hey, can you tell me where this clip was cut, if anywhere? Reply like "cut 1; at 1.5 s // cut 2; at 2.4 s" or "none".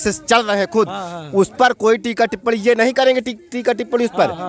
none

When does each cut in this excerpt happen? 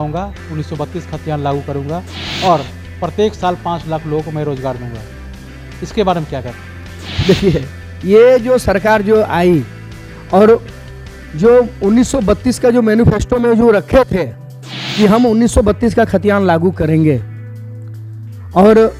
none

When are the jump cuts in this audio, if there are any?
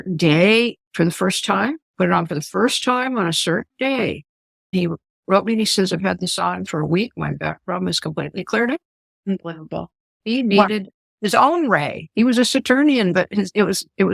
cut 1; at 4.7 s

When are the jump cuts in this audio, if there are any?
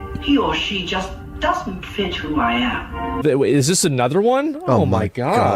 cut 1; at 3.2 s

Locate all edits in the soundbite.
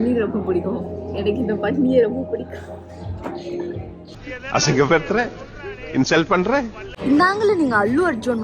cut 1; at 6.8 s

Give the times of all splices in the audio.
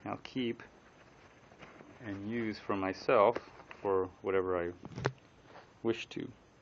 cut 1; at 1.8 s

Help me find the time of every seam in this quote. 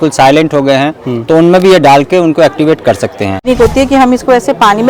cut 1; at 3.4 s

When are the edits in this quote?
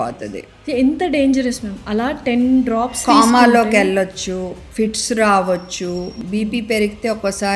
cut 1; at 4.6 s // cut 2; at 6.2 s

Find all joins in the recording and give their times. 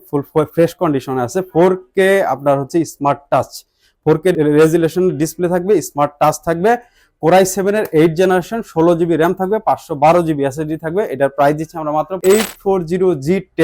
cut 1; at 4.3 s // cut 2; at 12.2 s

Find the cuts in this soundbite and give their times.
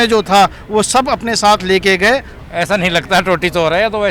cut 1; at 2.4 s

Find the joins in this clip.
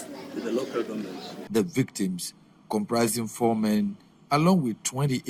cut 1; at 1.3 s

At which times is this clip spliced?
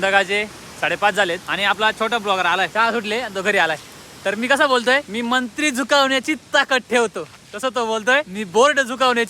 cut 1; at 1.5 s // cut 2; at 2.7 s // cut 3; at 5.1 s // cut 4; at 8.4 s

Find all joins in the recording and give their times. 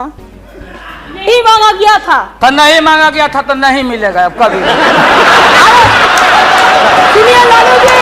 none

